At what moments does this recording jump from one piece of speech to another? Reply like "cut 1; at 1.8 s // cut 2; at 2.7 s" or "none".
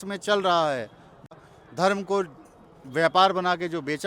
cut 1; at 1.4 s

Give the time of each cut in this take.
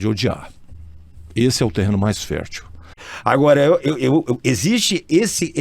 cut 1; at 3.0 s

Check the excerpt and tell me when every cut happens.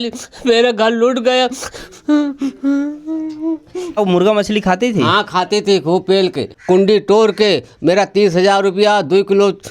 cut 1; at 4.0 s // cut 2; at 6.5 s

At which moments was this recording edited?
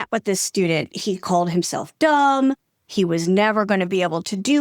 cut 1; at 0.9 s

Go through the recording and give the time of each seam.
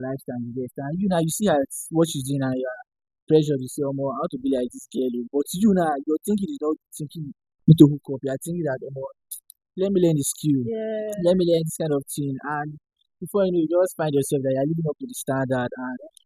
none

